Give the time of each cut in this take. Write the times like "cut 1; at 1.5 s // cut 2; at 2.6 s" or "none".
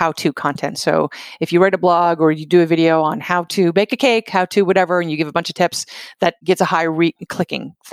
cut 1; at 6.4 s

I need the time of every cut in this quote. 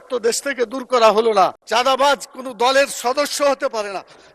cut 1; at 1.6 s

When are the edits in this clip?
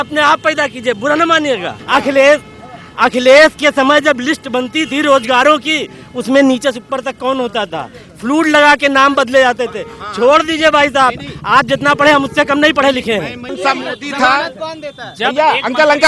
cut 1; at 1.7 s // cut 2; at 13.5 s

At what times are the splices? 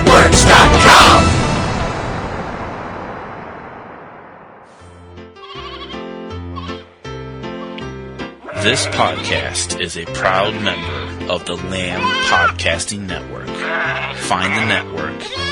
cut 1; at 5.0 s

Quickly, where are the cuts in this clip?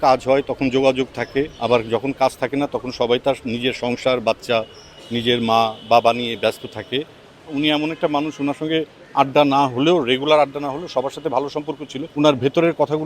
cut 1; at 1.5 s // cut 2; at 7.5 s // cut 3; at 12.0 s

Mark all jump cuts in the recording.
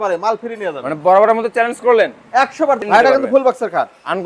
cut 1; at 2.8 s

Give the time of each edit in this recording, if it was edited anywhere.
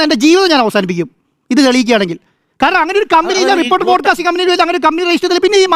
none

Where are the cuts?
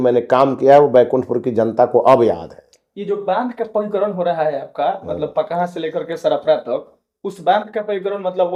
none

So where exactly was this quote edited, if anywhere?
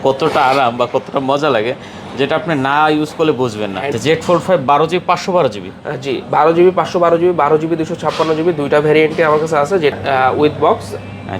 cut 1; at 3.9 s // cut 2; at 9.9 s

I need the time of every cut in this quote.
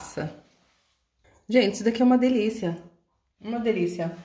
cut 1; at 1.4 s

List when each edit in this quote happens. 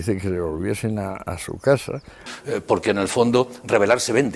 cut 1; at 2.3 s

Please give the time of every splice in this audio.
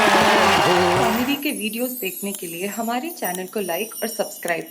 cut 1; at 1.1 s

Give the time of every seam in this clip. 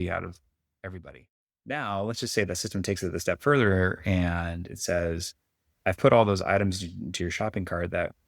cut 1; at 1.0 s

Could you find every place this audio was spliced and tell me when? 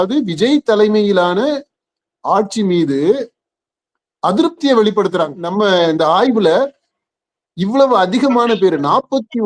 cut 1; at 5.4 s

